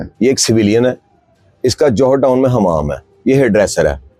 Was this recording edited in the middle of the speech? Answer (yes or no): no